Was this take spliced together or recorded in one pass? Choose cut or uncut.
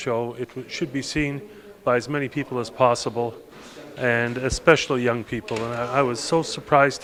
uncut